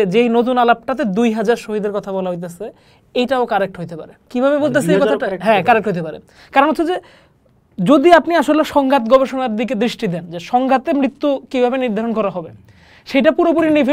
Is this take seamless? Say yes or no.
yes